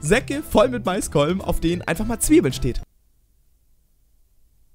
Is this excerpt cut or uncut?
uncut